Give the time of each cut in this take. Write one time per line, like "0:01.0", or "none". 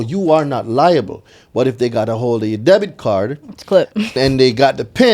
0:04.1

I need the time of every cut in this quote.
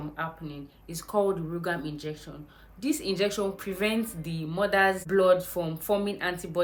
none

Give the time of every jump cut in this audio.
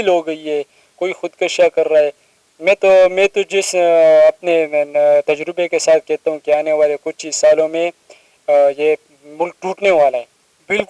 none

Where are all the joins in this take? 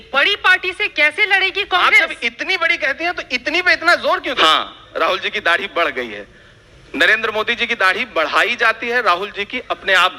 0:04.4

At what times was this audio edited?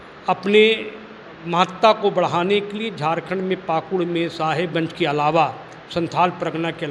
none

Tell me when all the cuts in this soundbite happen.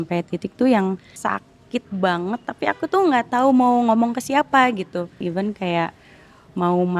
0:01.2
0:05.2

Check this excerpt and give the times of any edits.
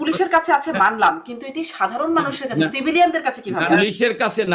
0:03.7

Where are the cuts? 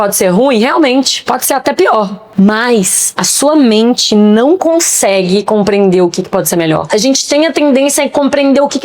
0:02.2
0:06.9

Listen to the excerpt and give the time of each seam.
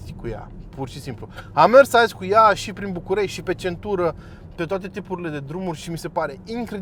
none

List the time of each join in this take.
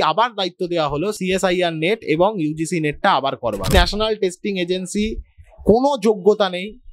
0:01.2
0:03.7

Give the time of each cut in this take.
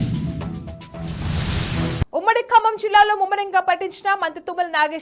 none

